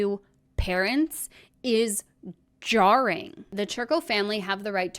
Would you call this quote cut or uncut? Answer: cut